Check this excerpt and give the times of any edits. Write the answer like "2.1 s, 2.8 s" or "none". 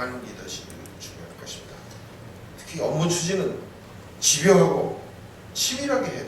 2.5 s

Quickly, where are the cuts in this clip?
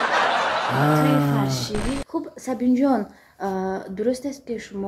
2.1 s

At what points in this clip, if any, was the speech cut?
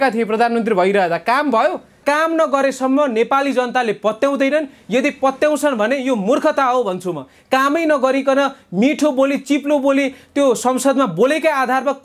2.0 s

